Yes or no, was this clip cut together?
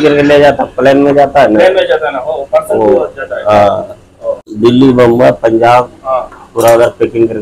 yes